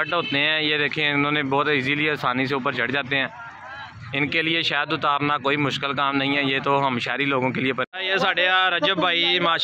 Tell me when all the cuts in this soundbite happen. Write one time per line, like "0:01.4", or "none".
0:07.9

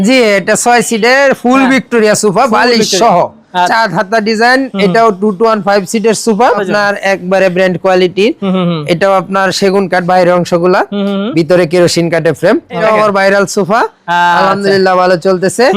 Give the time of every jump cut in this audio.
0:03.7
0:06.6
0:12.8

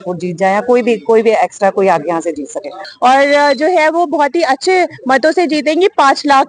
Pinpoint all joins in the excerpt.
0:02.8

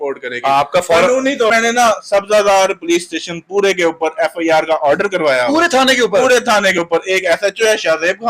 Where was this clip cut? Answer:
0:01.5

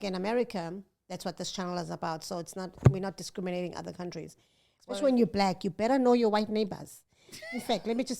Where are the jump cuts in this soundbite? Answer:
0:04.9

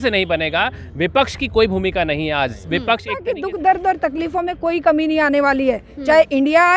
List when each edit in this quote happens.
0:03.2

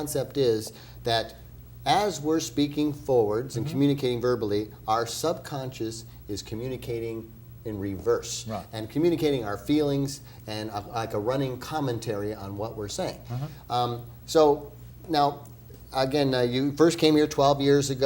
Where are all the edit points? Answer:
0:16.5

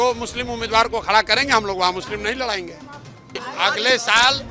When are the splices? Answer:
0:03.4

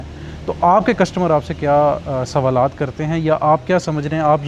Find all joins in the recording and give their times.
none

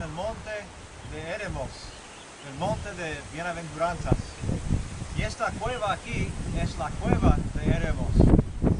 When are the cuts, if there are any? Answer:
none

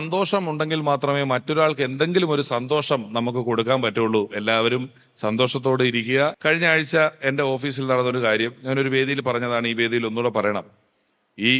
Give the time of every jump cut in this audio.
0:06.4

